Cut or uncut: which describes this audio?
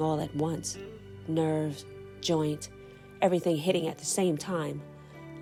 uncut